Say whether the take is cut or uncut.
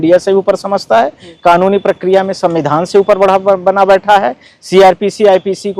uncut